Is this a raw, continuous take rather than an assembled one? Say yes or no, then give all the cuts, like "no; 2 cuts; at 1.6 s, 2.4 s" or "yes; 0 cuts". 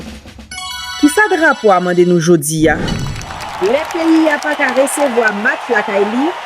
no; 1 cut; at 2.9 s